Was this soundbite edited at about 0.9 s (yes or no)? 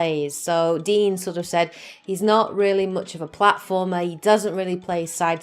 no